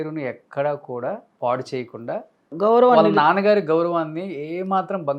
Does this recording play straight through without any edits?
no; 2 cuts; at 1.3 s, 2.5 s

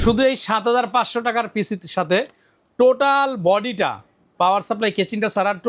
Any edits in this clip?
no; 0 cuts

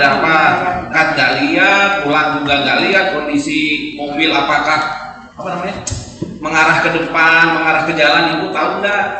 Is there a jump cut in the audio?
yes; 1 cut; at 0.9 s

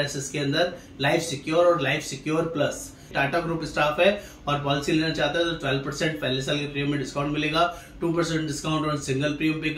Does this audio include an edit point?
yes; 1 cut; at 3.1 s

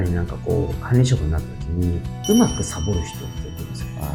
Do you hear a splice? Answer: no; 0 cuts

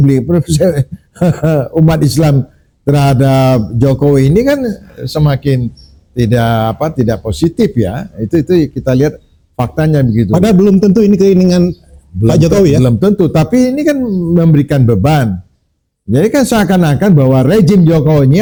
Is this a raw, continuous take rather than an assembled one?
yes; 0 cuts

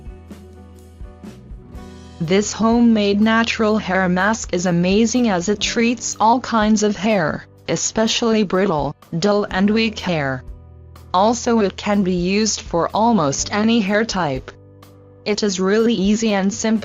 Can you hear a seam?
no; 0 cuts

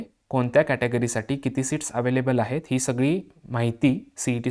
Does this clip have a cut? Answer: no; 0 cuts

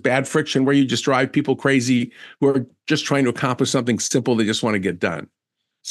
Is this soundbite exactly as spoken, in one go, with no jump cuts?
yes; 0 cuts

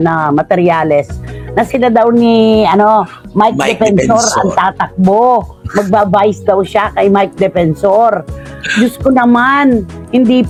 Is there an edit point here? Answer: no; 0 cuts

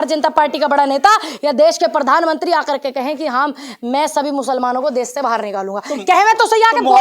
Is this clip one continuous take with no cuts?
yes; 0 cuts

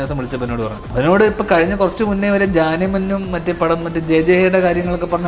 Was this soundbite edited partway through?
yes; 1 cut; at 0.9 s

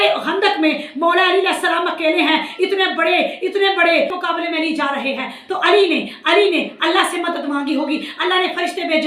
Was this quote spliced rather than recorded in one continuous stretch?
yes; 1 cut; at 4.2 s

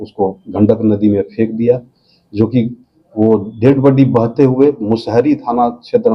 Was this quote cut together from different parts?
no; 0 cuts

